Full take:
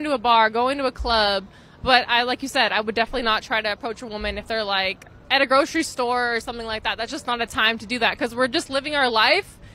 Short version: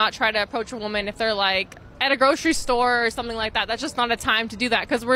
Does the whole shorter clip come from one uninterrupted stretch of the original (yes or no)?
yes